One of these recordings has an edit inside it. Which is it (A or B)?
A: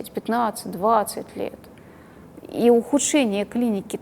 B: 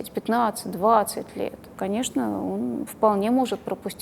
B